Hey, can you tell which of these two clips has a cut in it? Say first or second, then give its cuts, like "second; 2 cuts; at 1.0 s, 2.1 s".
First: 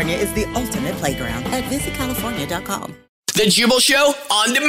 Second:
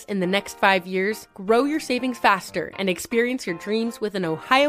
first; 1 cut; at 3.3 s